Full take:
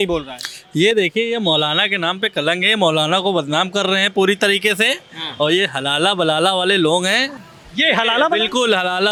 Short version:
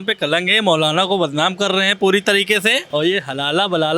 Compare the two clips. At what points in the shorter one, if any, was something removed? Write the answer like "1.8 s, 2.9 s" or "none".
2.8 s